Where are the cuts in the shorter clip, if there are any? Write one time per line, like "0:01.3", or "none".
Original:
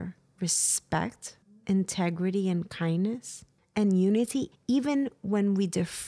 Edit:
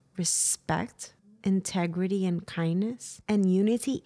0:03.1

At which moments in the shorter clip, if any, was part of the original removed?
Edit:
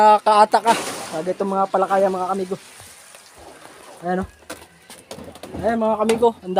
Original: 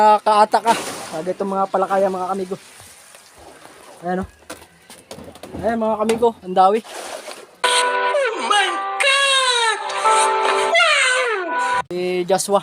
none

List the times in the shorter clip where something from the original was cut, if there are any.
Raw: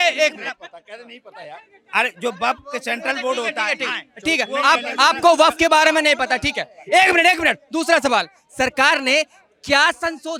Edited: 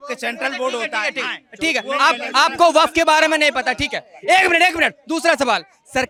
none

